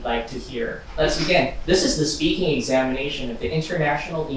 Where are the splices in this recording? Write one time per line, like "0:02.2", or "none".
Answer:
0:00.8
0:01.6

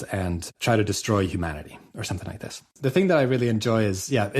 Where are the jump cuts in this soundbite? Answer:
0:02.7

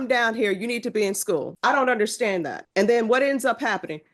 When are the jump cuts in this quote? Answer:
0:01.5
0:02.6

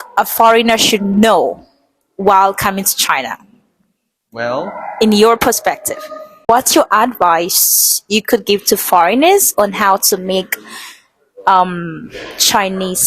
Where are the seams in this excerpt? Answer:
0:06.5

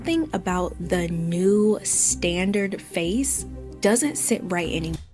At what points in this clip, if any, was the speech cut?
none

